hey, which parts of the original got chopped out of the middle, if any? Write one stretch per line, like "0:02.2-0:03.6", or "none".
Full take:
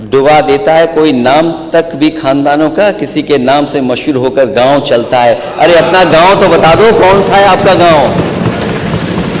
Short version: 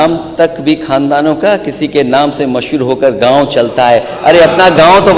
none